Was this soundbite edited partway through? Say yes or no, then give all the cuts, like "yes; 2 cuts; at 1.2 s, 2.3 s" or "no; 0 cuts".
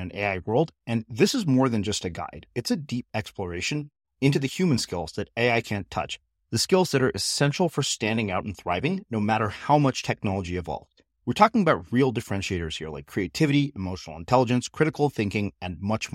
no; 0 cuts